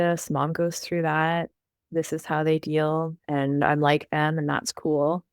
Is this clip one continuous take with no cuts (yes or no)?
no